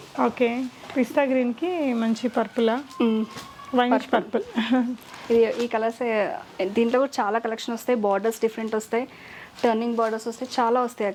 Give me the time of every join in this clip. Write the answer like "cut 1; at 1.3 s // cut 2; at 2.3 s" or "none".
none